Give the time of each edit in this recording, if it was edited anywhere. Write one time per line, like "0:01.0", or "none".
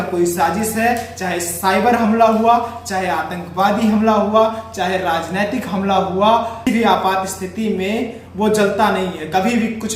0:06.7

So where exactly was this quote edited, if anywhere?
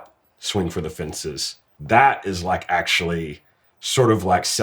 0:01.7

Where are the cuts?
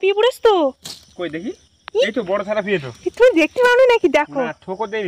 none

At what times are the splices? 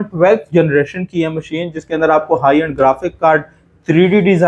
none

